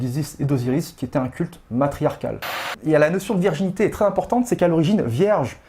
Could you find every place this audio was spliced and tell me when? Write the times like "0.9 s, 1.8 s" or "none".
2.7 s